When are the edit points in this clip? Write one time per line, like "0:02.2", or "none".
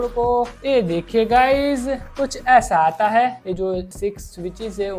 0:03.4